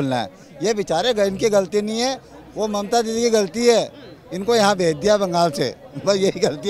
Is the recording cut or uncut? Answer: uncut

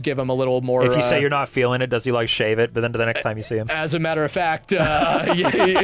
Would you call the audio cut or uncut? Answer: uncut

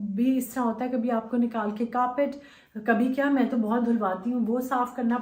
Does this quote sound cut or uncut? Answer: uncut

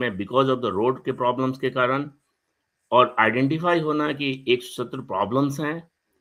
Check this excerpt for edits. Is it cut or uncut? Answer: uncut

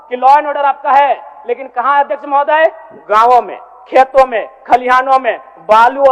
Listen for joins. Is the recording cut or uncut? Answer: uncut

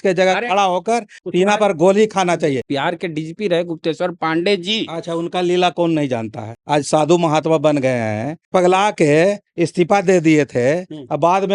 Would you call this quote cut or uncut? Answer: cut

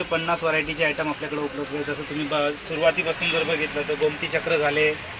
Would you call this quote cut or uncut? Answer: uncut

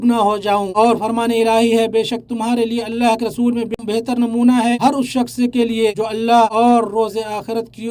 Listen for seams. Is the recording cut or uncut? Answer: cut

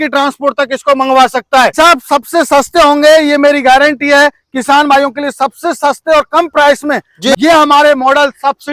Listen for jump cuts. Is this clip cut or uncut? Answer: cut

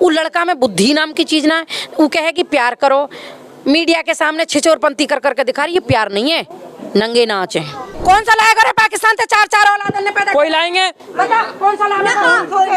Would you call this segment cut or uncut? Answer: cut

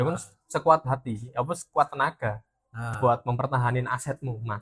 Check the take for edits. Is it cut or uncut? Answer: uncut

